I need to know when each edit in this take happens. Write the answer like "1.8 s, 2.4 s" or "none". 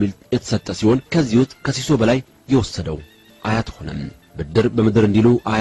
none